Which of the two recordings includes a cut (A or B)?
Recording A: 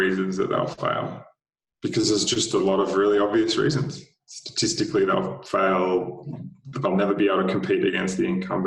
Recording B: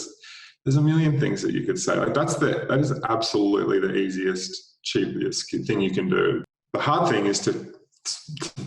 B